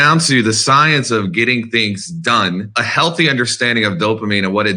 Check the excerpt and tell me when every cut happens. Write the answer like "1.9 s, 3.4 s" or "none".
2.8 s